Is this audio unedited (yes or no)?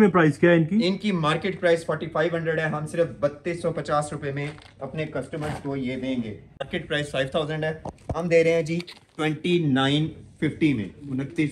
no